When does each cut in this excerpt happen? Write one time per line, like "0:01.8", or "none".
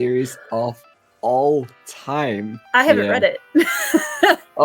0:02.5

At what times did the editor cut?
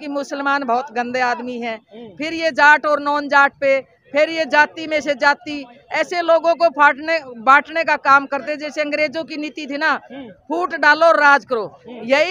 none

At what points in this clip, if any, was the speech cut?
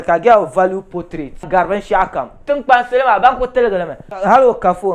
0:01.4
0:04.1

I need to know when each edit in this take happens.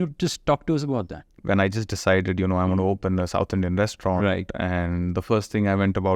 0:01.4

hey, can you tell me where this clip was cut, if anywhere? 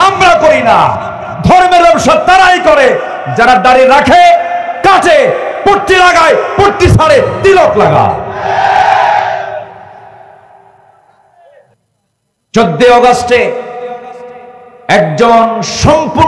0:11.7

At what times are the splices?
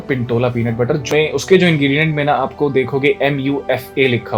0:01.0

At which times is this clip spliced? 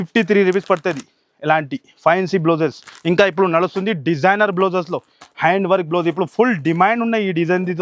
none

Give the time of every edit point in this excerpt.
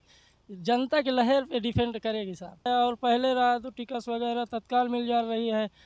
0:02.7

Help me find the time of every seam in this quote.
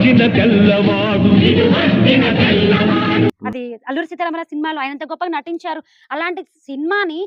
none

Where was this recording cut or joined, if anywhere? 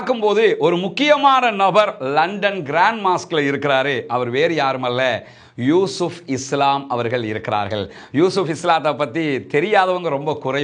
none

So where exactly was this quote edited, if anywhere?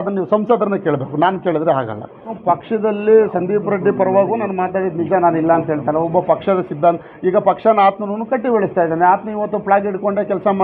0:02.3

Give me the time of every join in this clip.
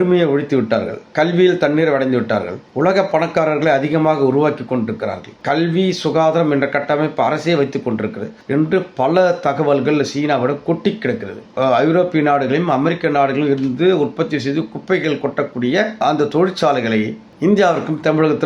0:11.5

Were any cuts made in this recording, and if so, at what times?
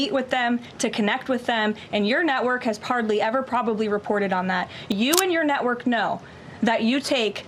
0:04.9

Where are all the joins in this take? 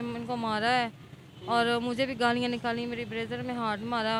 none

